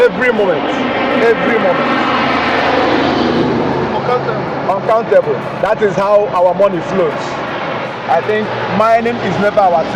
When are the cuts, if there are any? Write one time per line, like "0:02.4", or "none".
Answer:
0:07.9